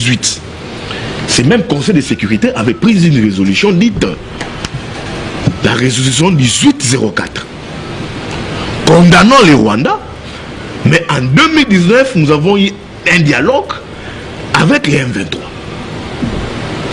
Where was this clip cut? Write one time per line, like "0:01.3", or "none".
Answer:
none